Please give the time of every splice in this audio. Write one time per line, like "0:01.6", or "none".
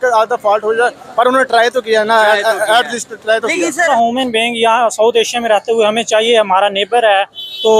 0:03.8